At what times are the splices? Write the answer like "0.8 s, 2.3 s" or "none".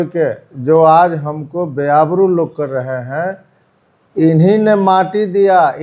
none